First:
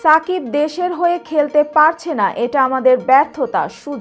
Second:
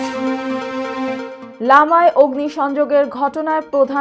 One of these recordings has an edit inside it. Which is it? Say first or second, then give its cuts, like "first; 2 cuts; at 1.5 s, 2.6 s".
second; 1 cut; at 1.4 s